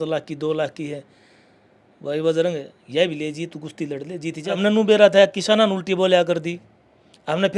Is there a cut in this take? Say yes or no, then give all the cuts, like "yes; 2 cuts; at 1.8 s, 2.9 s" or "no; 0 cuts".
yes; 1 cut; at 4.6 s